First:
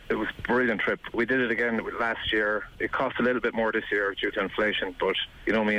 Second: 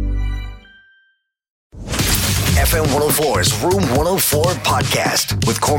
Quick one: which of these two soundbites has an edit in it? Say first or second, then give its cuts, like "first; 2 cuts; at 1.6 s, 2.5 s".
second; 1 cut; at 1.7 s